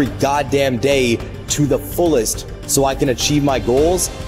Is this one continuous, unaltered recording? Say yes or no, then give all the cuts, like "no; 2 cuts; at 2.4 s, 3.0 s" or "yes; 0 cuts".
yes; 0 cuts